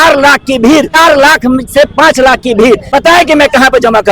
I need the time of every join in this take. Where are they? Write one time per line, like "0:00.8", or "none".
0:00.9
0:02.9

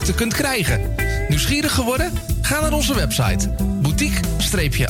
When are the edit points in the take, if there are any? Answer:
none

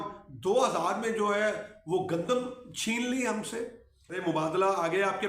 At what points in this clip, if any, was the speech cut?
0:04.2

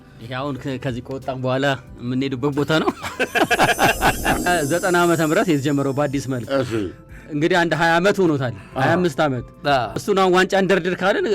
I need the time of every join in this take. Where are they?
0:04.4

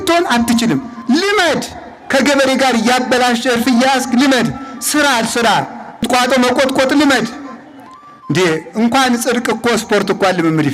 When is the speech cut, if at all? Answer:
0:00.9
0:06.0

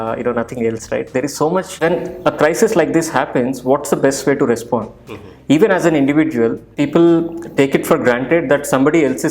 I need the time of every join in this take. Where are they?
0:01.7
0:06.7

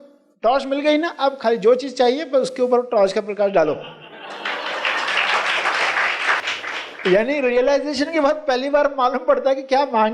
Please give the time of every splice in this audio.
0:06.5

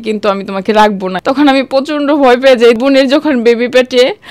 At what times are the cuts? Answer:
0:01.2
0:02.8

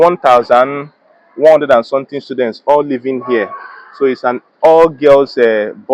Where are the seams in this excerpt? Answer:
none

